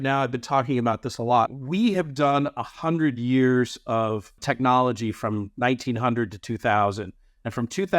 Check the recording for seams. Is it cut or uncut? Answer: cut